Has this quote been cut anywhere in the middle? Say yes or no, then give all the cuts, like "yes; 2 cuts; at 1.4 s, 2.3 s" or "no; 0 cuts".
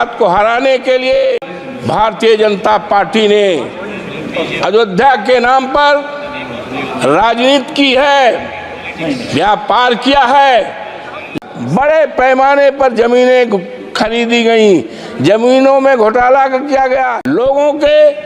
yes; 3 cuts; at 1.5 s, 11.3 s, 17.2 s